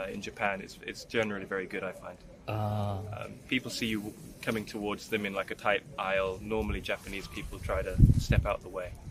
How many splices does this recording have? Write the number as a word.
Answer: zero